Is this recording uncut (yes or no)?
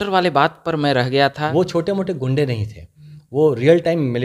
no